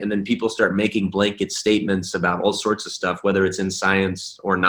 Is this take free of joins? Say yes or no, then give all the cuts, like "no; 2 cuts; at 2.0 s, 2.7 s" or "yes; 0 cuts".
yes; 0 cuts